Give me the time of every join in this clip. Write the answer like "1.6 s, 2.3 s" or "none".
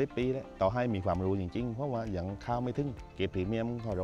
3.0 s